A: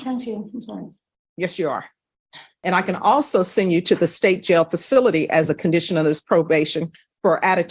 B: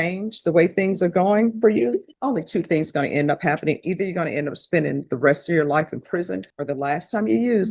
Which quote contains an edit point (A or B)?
A